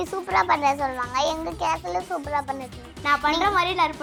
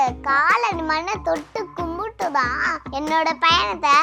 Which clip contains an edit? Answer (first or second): second